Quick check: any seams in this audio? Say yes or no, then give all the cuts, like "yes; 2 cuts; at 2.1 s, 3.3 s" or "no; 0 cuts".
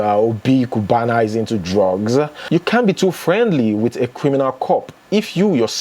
no; 0 cuts